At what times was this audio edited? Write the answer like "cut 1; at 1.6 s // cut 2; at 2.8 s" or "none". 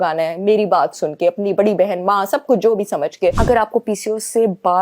cut 1; at 3.4 s